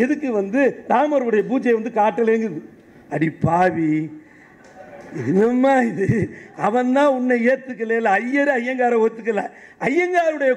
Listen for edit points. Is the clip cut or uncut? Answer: uncut